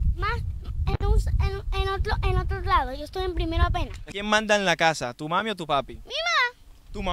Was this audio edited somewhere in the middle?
yes; 1 cut; at 4.0 s

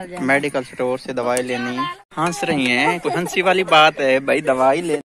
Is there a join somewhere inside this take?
yes; 1 cut; at 2.0 s

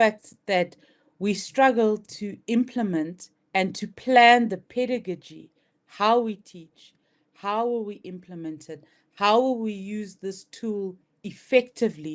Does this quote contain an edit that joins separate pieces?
no; 0 cuts

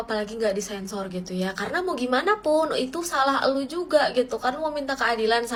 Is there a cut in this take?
no; 0 cuts

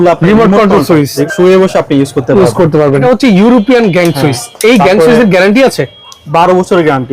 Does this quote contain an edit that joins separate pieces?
yes; 2 cuts; at 1.2 s, 3.0 s

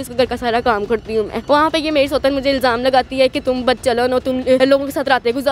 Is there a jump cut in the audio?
yes; 2 cuts; at 1.4 s, 4.6 s

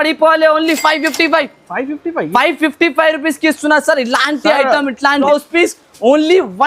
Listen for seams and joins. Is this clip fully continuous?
no; 1 cut; at 5.2 s

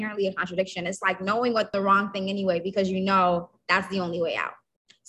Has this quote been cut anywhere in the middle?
yes; 1 cut; at 1.7 s

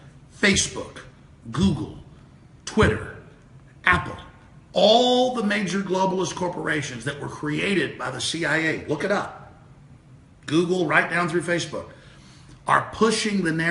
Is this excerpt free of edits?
no; 1 cut; at 2.6 s

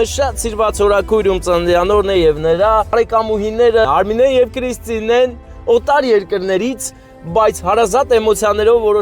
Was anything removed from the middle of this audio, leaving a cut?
yes; 2 cuts; at 2.9 s, 3.9 s

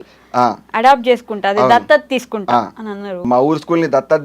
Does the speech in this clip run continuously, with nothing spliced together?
no; 1 cut; at 3.2 s

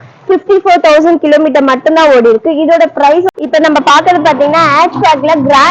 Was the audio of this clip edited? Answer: yes; 1 cut; at 3.4 s

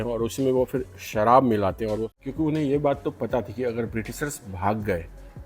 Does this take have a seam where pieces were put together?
yes; 1 cut; at 2.1 s

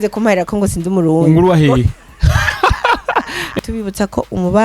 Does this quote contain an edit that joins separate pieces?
yes; 1 cut; at 3.6 s

